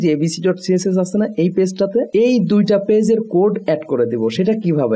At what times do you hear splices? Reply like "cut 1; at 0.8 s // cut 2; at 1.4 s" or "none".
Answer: cut 1; at 2.1 s

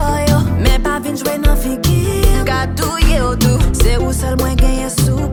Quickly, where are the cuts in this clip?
none

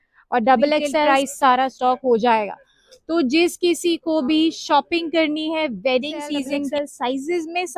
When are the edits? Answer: cut 1; at 1.1 s // cut 2; at 6.7 s

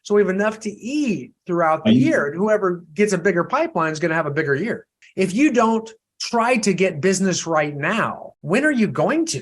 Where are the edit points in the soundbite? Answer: cut 1; at 8.3 s

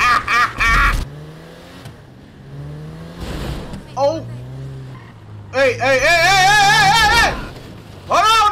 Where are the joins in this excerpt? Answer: cut 1; at 1.1 s

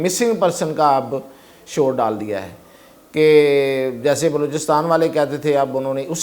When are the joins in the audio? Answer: none

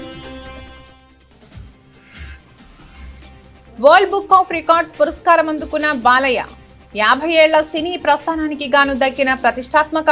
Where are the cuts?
cut 1; at 1.0 s // cut 2; at 3.8 s

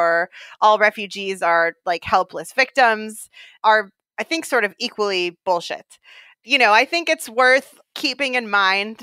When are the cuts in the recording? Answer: cut 1; at 3.5 s // cut 2; at 7.8 s

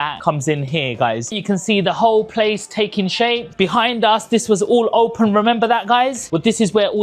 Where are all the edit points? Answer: cut 1; at 1.3 s // cut 2; at 3.4 s

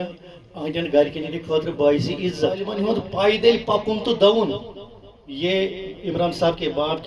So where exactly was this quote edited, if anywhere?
cut 1; at 2.7 s

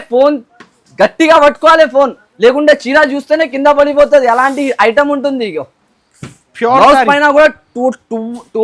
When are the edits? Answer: none

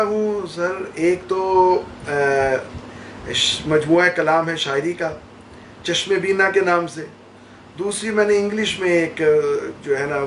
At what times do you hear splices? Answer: none

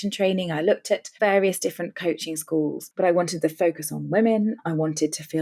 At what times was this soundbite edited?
cut 1; at 2.8 s

